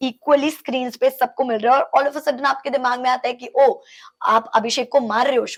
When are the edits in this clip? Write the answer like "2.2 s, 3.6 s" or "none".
none